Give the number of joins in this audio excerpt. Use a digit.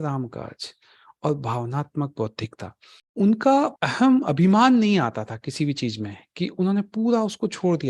2